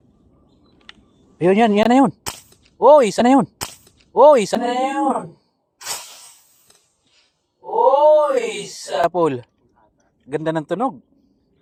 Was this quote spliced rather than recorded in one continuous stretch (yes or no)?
no